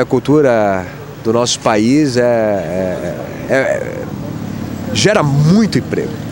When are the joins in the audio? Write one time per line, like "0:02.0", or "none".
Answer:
none